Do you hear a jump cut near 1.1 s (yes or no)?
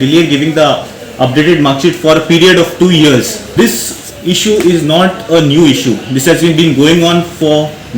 no